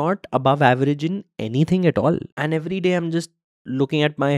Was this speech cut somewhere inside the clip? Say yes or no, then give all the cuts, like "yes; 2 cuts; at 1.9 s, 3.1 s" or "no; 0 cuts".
yes; 1 cut; at 2.3 s